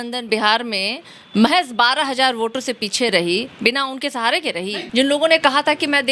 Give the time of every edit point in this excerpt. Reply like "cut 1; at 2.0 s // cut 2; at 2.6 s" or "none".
cut 1; at 4.8 s